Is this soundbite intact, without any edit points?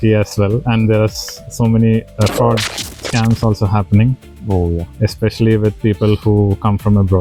yes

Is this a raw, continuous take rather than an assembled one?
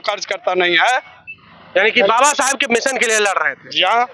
yes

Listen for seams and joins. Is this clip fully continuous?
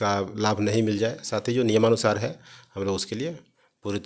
yes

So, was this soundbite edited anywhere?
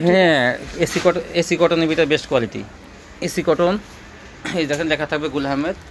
no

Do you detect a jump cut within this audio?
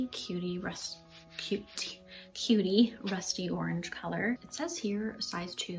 yes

